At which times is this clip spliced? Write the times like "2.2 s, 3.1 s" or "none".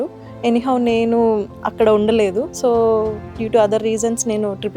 2.5 s